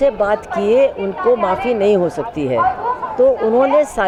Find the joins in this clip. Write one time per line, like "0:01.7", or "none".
none